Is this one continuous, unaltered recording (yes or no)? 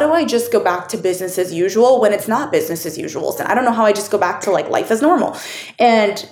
no